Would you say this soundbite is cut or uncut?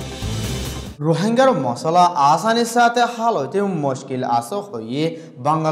cut